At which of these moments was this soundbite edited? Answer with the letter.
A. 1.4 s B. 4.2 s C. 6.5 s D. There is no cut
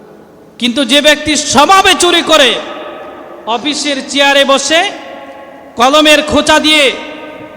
A